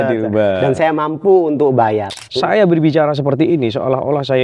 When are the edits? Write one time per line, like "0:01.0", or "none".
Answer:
0:02.1